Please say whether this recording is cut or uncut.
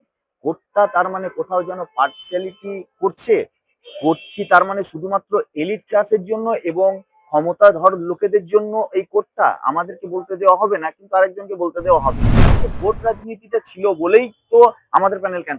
cut